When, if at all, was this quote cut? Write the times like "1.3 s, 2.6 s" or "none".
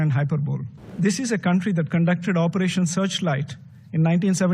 0.9 s

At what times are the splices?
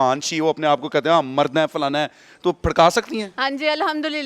3.3 s

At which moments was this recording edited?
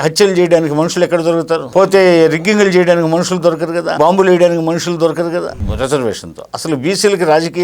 1.8 s, 3.9 s, 5.6 s

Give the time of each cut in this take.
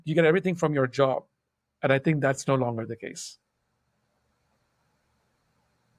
none

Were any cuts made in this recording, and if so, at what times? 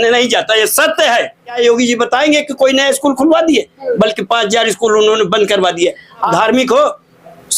1.6 s, 6.3 s

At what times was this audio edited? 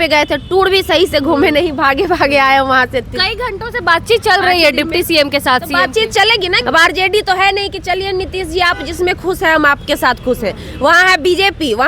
6.6 s

